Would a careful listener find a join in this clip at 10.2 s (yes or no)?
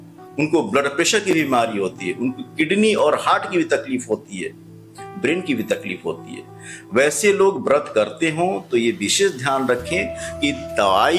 no